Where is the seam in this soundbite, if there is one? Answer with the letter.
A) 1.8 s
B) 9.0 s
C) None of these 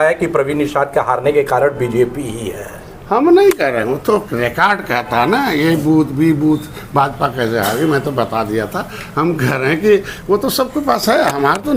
C